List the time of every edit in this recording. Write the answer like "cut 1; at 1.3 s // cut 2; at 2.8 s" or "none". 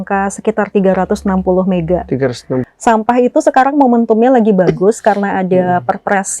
cut 1; at 2.6 s